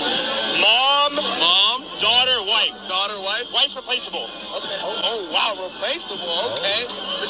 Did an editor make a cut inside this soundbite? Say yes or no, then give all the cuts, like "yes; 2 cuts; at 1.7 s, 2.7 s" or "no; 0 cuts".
no; 0 cuts